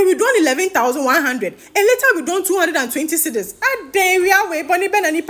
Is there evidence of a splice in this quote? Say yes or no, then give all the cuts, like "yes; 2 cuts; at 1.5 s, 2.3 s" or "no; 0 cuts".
no; 0 cuts